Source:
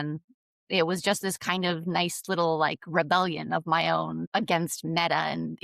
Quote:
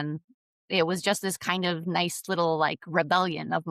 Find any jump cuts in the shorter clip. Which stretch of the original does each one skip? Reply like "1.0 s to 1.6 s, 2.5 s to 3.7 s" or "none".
none